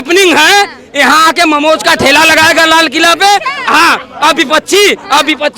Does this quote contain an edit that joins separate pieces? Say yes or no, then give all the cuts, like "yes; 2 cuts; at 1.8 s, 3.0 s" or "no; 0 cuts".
no; 0 cuts